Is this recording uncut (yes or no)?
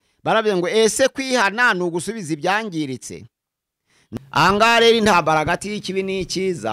no